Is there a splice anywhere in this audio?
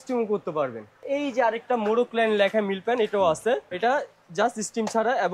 yes; 2 cuts; at 1.0 s, 3.7 s

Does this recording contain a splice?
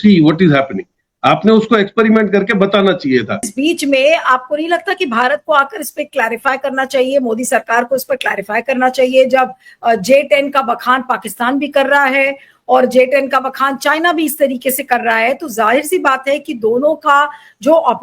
yes; 1 cut; at 3.5 s

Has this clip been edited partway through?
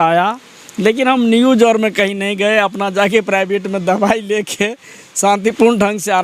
no; 0 cuts

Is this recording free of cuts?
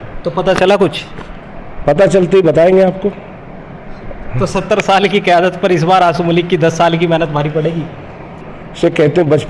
no; 1 cut; at 8.5 s

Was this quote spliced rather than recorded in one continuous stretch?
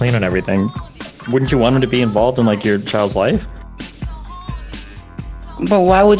no; 0 cuts

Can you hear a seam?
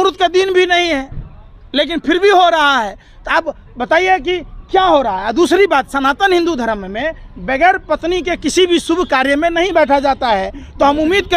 no; 0 cuts

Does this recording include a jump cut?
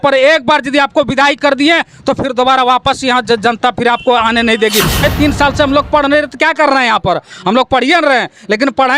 yes; 1 cut; at 5.0 s

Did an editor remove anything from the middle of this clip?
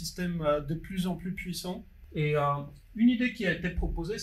yes; 1 cut; at 1.9 s

